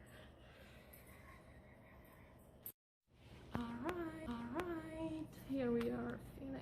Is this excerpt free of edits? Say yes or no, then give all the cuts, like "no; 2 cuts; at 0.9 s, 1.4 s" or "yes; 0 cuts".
yes; 0 cuts